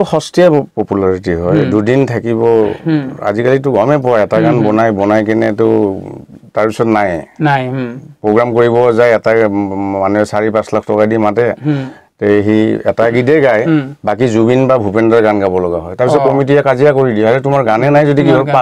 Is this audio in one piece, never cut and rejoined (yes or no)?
yes